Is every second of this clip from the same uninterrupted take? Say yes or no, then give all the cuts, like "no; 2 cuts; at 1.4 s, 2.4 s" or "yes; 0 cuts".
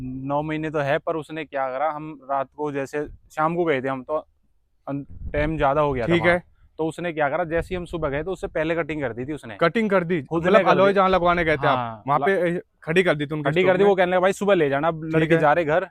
yes; 0 cuts